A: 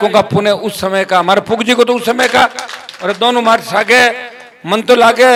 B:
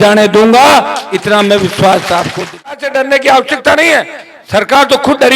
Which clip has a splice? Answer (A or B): B